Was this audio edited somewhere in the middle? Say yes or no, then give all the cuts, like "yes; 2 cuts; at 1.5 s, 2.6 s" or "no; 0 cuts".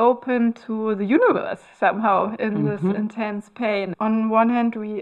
yes; 1 cut; at 3.9 s